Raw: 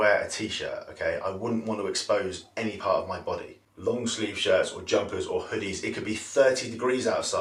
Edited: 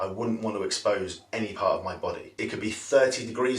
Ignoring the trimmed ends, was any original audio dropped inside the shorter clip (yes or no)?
yes